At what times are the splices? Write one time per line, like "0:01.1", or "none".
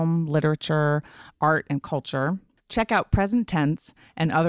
0:02.5